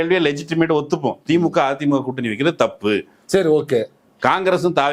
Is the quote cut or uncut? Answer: uncut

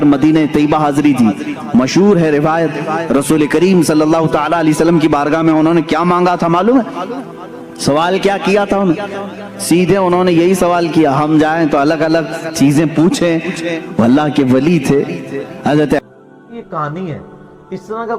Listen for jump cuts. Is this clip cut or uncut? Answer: cut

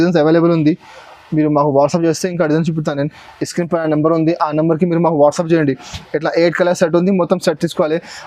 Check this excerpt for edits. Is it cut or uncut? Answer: uncut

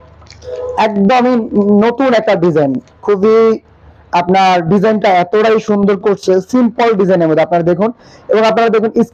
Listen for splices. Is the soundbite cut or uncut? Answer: uncut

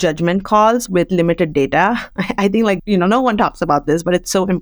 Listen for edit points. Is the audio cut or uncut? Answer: cut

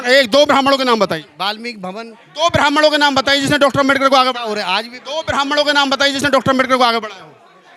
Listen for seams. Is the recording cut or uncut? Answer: uncut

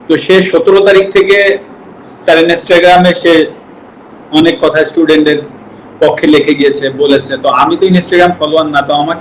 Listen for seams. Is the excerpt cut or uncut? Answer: uncut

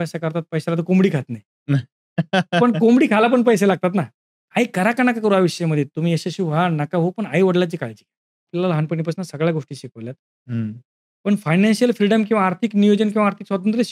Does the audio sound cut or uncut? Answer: cut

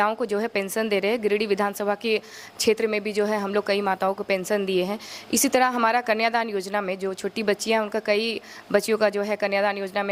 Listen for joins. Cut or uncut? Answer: uncut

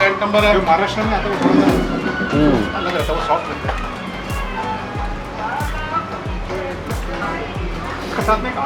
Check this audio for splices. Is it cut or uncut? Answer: uncut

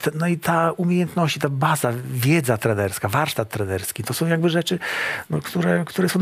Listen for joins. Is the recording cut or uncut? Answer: uncut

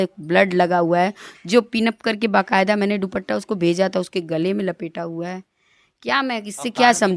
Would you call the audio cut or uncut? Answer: uncut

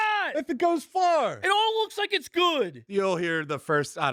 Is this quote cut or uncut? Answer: uncut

